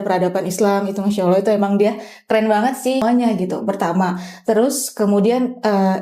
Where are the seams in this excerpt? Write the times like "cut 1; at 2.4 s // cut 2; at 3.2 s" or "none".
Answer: cut 1; at 3.0 s